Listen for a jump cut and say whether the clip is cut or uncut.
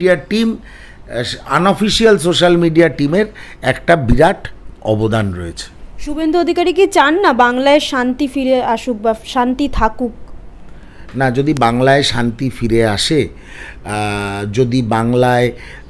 uncut